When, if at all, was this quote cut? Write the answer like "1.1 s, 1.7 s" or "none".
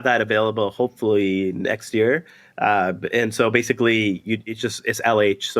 none